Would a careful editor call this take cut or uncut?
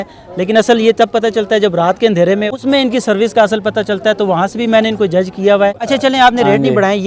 cut